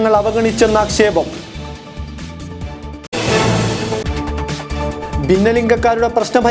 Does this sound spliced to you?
no; 0 cuts

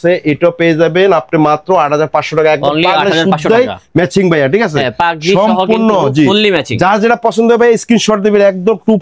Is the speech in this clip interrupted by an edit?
no; 0 cuts

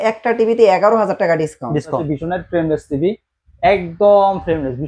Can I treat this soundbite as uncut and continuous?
no; 1 cut; at 2.0 s

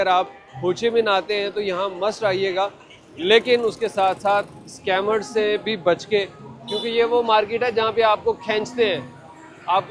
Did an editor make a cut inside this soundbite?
no; 0 cuts

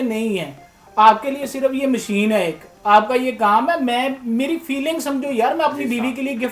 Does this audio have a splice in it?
no; 0 cuts

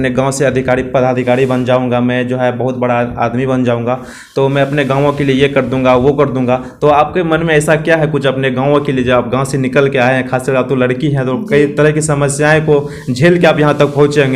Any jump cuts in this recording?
no; 0 cuts

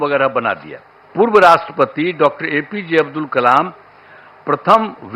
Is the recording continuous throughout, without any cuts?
no; 1 cut; at 1.1 s

